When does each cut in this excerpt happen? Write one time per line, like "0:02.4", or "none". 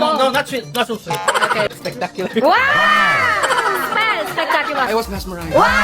0:01.7
0:04.9